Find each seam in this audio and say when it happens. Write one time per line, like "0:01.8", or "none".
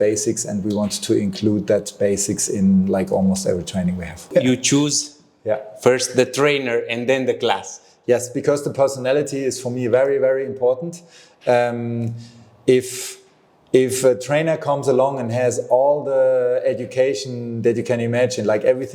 0:04.2